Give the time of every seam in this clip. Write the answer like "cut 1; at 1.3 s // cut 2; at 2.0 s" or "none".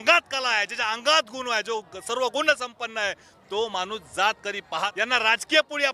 cut 1; at 4.9 s